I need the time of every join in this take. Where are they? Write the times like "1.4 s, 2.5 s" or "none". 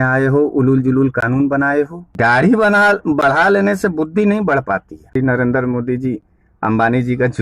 2.0 s, 5.2 s